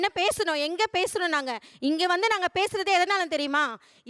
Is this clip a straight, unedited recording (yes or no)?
no